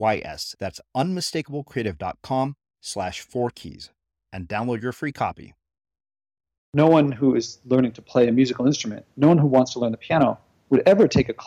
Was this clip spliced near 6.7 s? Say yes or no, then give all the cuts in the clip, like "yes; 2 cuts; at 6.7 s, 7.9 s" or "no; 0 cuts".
yes; 1 cut; at 6.7 s